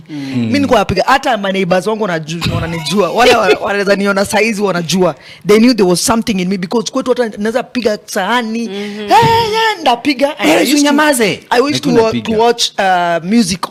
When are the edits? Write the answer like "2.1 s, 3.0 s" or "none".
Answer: none